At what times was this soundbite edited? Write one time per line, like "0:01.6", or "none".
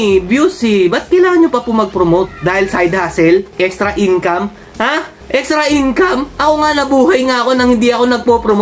0:03.5